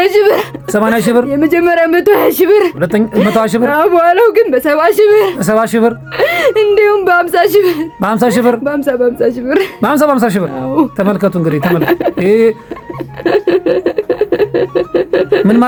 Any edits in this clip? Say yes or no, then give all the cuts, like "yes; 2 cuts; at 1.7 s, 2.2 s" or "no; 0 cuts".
no; 0 cuts